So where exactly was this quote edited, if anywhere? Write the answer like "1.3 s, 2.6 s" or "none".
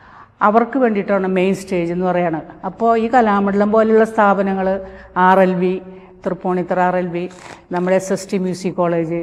none

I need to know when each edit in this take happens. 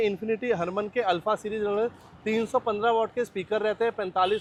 none

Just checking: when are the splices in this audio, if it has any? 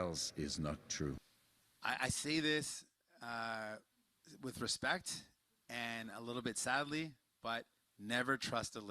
1.2 s

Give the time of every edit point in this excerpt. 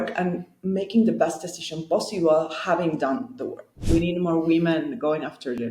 3.8 s

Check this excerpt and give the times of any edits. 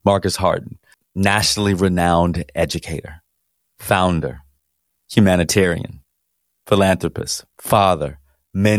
1.0 s, 5.0 s

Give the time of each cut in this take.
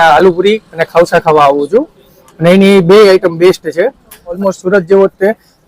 4.4 s

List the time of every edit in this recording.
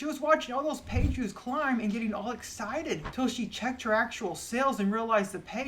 3.1 s

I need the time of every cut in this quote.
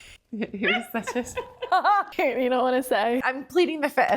2.1 s, 3.2 s

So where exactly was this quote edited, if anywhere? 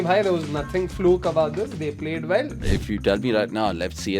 2.6 s

